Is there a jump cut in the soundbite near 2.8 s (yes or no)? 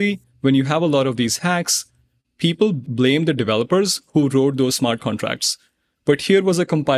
yes